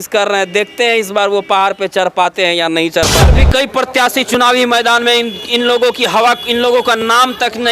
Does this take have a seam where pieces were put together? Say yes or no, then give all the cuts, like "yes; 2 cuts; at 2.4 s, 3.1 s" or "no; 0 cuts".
yes; 1 cut; at 3.3 s